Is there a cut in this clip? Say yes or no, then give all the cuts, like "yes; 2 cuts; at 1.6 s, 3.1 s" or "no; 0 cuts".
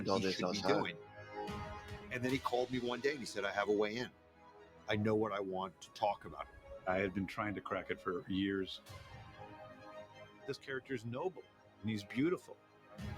no; 0 cuts